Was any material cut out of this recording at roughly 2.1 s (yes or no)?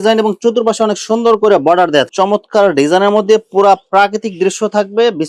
yes